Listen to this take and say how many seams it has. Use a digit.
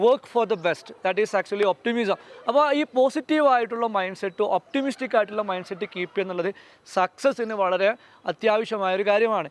0